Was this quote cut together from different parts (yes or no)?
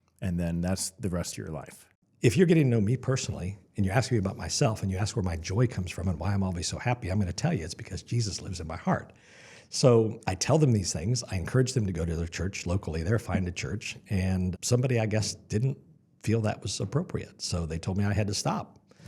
yes